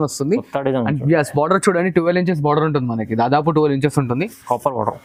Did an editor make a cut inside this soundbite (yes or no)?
no